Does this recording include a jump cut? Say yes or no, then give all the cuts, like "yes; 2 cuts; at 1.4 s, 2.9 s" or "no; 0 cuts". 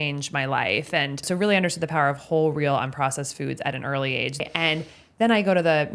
yes; 2 cuts; at 1.2 s, 4.4 s